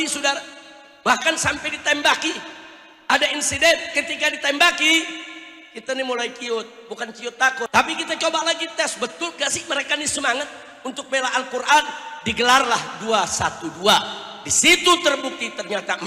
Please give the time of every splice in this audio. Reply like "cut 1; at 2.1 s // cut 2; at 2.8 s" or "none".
cut 1; at 7.7 s